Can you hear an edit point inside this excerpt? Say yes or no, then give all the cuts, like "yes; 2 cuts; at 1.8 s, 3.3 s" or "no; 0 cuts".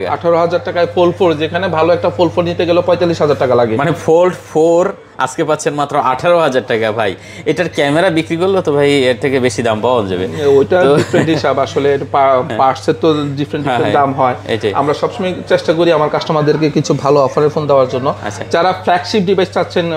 no; 0 cuts